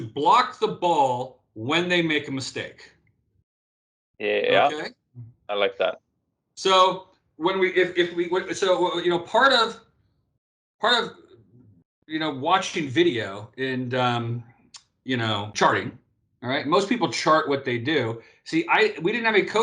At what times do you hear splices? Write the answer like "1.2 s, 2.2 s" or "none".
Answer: 15.5 s

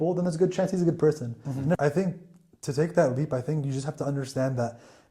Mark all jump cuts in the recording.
1.8 s

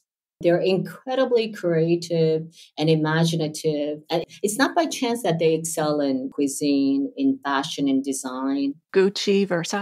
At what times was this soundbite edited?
6.3 s, 8.8 s

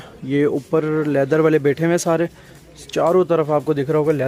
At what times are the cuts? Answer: none

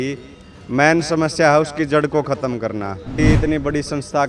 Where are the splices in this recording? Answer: 3.2 s

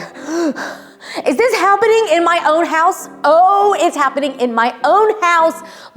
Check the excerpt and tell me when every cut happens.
none

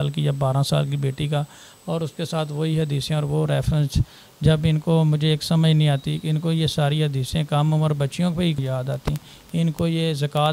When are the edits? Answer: 8.6 s

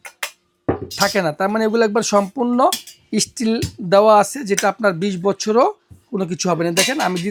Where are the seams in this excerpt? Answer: none

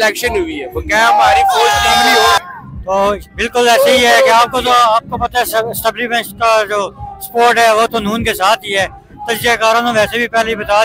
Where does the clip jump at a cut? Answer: 2.4 s

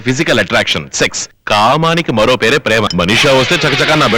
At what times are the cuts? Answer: 1.3 s, 2.9 s

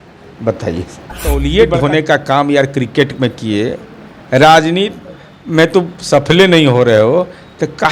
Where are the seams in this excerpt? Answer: 1.4 s

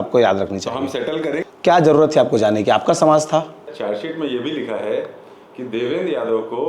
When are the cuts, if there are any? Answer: 1.5 s, 3.7 s

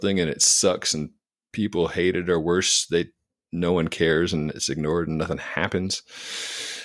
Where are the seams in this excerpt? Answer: none

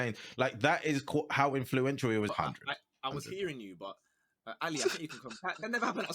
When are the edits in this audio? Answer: 2.3 s

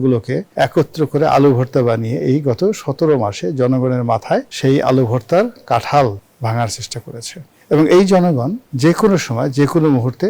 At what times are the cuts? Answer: 8.7 s

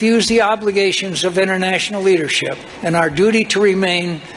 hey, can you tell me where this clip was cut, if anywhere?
2.6 s

